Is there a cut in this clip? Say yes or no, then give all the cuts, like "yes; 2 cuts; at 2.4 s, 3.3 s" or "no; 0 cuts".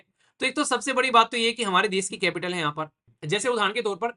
yes; 1 cut; at 3.1 s